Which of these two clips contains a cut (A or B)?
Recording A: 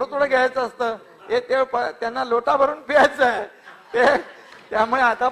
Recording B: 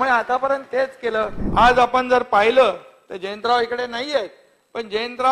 B